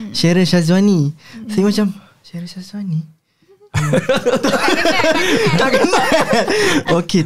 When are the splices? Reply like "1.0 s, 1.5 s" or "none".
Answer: none